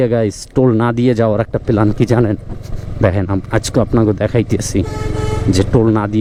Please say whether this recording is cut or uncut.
uncut